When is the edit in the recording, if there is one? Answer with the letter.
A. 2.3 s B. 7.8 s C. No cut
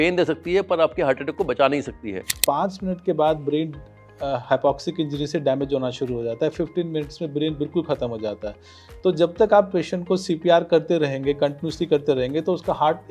A